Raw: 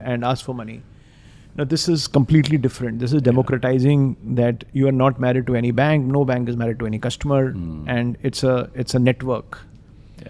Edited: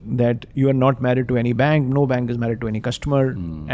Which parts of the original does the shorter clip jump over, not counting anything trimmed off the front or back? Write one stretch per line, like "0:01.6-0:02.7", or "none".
none